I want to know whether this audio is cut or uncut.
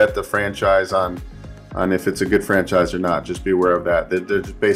uncut